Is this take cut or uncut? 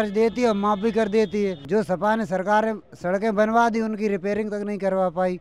cut